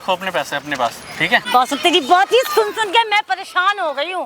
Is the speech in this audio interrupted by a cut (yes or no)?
yes